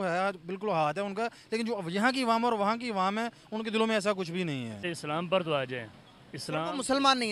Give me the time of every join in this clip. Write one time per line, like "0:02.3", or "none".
0:04.9